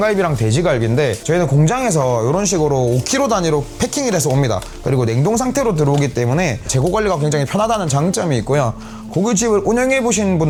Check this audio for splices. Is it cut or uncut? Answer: uncut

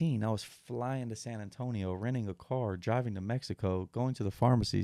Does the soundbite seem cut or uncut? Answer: uncut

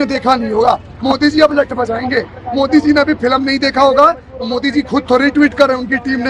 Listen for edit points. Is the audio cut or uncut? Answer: uncut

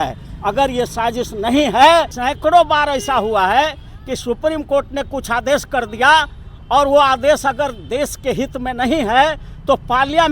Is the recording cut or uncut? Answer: cut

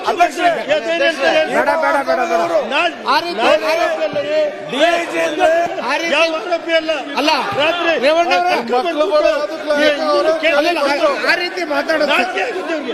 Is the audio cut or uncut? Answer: uncut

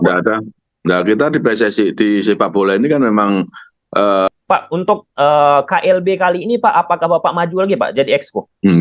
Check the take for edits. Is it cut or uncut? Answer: cut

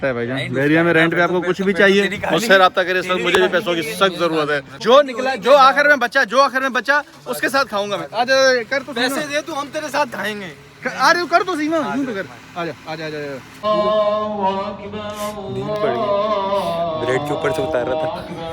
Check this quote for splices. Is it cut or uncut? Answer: cut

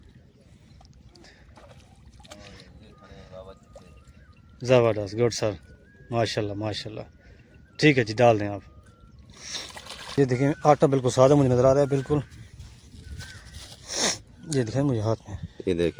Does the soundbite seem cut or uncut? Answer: cut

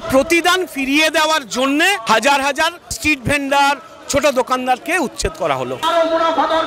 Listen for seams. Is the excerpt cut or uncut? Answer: cut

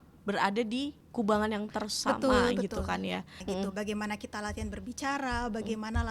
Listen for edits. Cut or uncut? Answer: cut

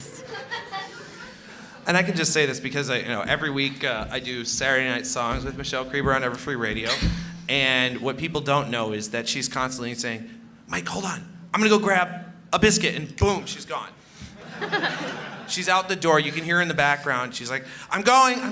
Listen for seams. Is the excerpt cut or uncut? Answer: uncut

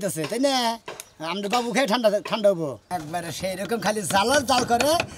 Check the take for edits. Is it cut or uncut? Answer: cut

